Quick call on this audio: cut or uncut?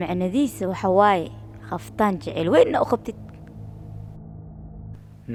uncut